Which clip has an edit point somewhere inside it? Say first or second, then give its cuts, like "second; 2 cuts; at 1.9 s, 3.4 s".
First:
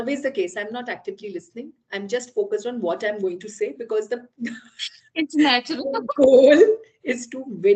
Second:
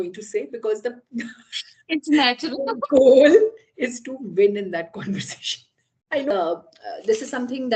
second; 1 cut; at 6.3 s